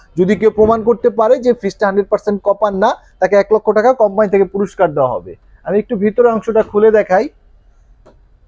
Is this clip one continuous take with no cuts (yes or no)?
yes